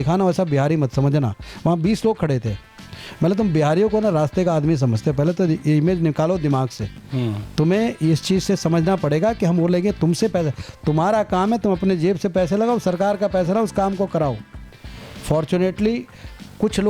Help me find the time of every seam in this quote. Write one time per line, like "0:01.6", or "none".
none